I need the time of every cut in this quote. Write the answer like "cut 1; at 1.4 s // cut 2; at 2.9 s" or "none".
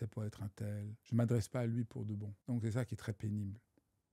cut 1; at 0.9 s // cut 2; at 2.3 s